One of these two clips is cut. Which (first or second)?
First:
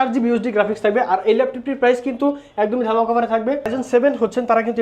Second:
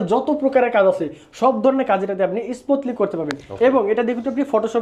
first